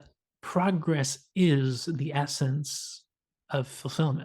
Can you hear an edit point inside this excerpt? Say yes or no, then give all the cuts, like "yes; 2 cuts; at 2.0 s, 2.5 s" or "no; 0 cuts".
no; 0 cuts